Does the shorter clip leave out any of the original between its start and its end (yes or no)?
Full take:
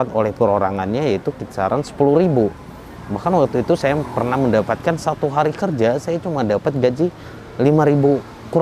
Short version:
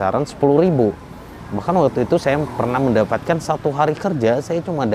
no